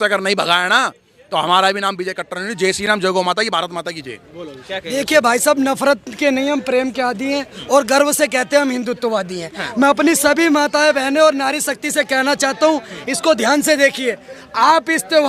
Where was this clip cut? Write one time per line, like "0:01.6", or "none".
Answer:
none